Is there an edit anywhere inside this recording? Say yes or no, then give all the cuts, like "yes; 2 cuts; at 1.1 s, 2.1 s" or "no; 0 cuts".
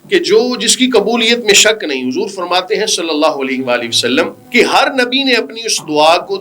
yes; 1 cut; at 4.4 s